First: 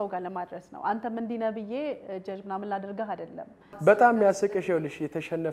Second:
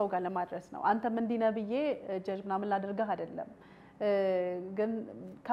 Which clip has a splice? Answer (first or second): first